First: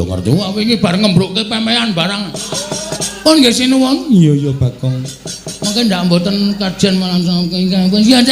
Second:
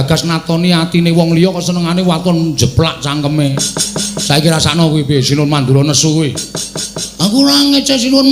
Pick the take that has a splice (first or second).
first